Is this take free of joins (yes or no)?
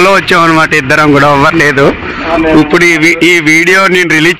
yes